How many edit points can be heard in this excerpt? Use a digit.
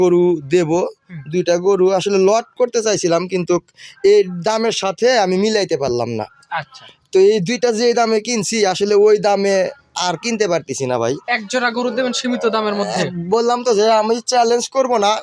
0